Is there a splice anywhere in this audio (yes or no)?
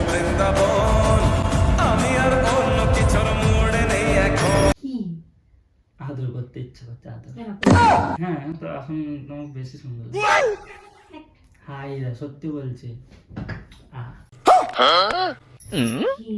no